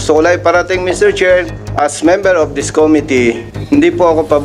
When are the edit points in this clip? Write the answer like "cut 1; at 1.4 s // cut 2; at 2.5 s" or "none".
cut 1; at 1.6 s // cut 2; at 3.5 s